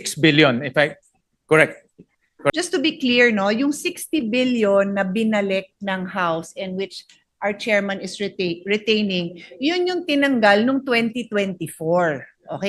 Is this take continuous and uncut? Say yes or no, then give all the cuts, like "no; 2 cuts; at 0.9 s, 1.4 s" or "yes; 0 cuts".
no; 1 cut; at 2.5 s